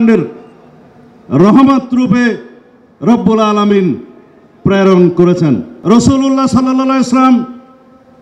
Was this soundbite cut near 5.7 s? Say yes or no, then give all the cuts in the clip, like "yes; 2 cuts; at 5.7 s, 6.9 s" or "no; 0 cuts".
yes; 1 cut; at 5.7 s